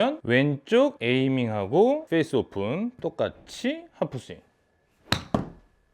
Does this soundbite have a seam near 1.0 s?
yes; 1 cut; at 1.0 s

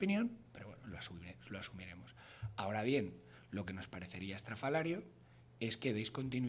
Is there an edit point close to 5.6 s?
yes; 1 cut; at 5.6 s

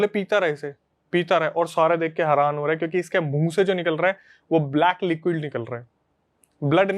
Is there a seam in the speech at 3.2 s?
no; 0 cuts

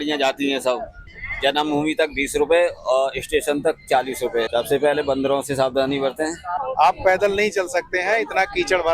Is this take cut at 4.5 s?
yes; 3 cuts; at 0.9 s, 4.5 s, 6.6 s

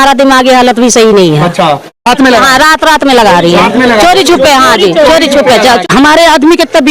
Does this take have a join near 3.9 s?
no; 2 cuts; at 2.1 s, 5.8 s

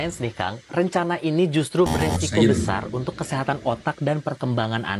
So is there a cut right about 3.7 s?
no; 0 cuts

